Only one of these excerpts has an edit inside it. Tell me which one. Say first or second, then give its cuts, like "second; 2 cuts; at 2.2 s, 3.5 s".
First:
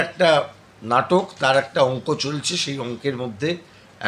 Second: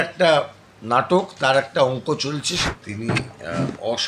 second; 1 cut; at 2.6 s